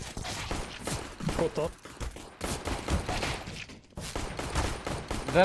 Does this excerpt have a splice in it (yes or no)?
no